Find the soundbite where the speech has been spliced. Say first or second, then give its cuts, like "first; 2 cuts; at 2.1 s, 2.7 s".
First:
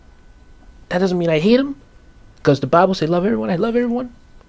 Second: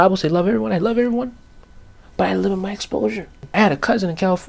second; 1 cut; at 3.4 s